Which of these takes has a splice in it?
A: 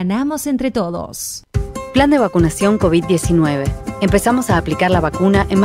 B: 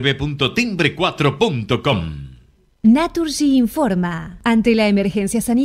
A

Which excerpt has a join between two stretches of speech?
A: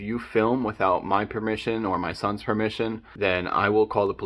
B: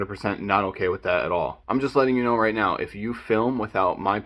B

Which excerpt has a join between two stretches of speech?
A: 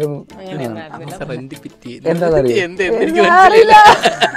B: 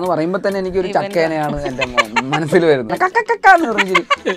B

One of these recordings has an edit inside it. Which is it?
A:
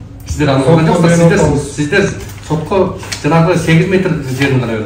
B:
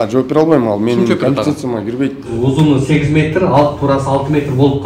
B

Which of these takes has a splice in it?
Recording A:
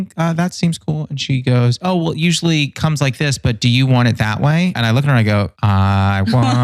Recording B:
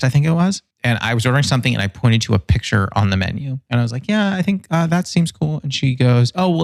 A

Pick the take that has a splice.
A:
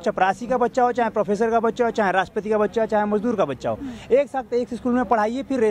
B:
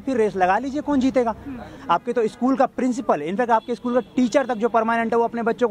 B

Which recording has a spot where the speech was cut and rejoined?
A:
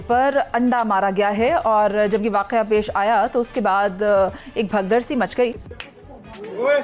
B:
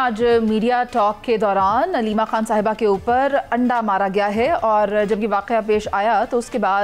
A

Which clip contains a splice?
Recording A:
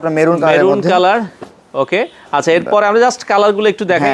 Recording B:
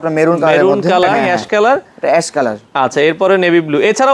B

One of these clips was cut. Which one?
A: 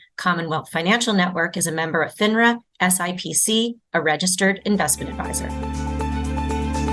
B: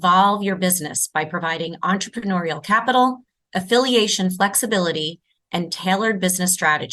A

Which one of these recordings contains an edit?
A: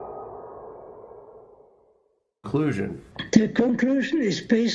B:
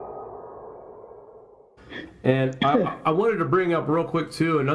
B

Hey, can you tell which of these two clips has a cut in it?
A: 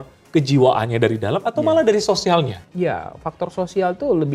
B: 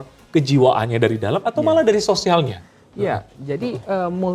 A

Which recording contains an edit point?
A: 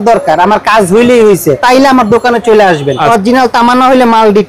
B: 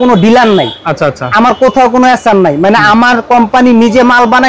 A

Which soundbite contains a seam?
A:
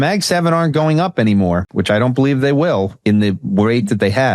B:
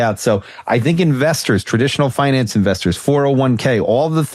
A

